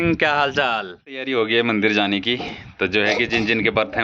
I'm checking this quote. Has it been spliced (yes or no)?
yes